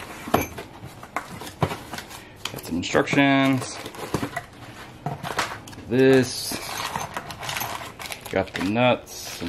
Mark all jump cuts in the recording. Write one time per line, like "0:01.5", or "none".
none